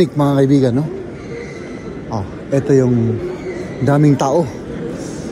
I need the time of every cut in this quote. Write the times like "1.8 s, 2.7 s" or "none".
none